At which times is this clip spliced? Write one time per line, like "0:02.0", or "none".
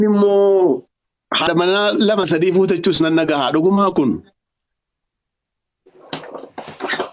0:01.4